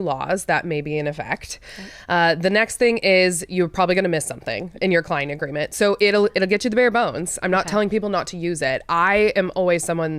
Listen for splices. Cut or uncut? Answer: uncut